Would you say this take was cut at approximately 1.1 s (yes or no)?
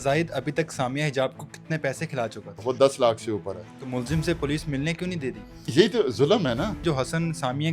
no